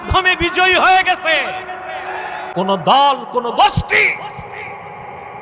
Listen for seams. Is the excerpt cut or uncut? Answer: cut